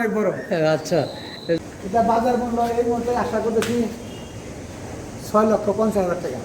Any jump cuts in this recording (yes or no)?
yes